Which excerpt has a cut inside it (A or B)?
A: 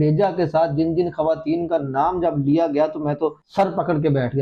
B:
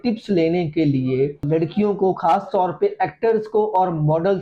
B